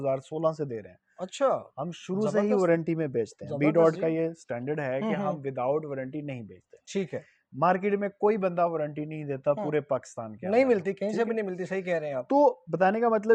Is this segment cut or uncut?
uncut